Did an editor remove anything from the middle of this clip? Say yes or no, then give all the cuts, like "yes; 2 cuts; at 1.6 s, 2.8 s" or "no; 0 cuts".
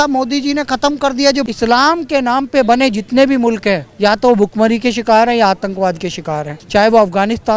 yes; 3 cuts; at 1.5 s, 3.9 s, 6.5 s